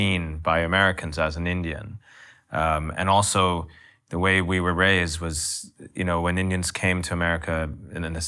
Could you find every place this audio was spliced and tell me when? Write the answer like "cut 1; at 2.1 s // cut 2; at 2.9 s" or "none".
none